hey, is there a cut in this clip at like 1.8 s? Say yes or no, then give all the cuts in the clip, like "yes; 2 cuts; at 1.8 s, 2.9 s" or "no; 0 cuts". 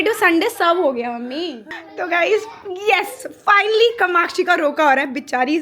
yes; 1 cut; at 1.8 s